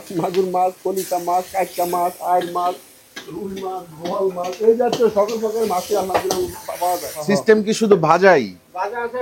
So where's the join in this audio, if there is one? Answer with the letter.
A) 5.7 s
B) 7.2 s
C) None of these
B